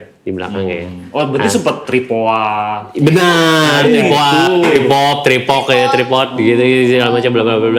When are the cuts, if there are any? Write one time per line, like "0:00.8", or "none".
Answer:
none